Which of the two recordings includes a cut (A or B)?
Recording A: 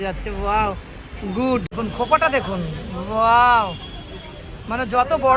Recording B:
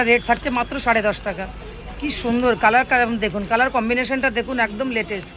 A